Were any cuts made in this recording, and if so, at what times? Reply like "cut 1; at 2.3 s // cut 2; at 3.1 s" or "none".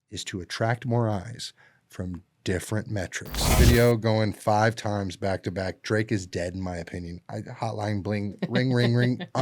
cut 1; at 3.4 s